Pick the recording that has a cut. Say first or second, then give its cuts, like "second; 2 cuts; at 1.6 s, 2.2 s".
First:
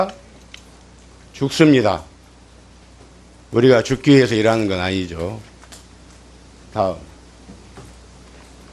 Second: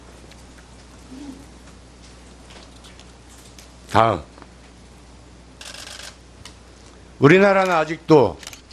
second; 1 cut; at 4.5 s